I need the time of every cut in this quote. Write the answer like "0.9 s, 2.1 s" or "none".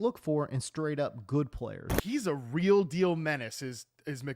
1.9 s